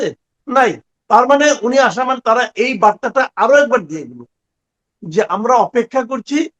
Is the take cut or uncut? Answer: cut